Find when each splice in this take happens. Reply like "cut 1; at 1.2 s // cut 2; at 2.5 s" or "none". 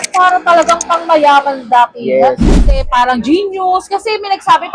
cut 1; at 2.5 s